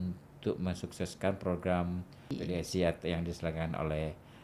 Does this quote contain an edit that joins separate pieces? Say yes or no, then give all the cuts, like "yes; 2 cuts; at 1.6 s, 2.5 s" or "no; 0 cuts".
yes; 1 cut; at 2.4 s